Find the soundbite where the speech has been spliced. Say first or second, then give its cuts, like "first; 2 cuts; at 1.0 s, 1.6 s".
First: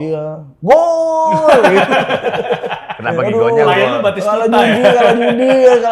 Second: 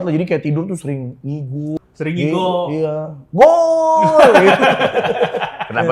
second; 1 cut; at 1.8 s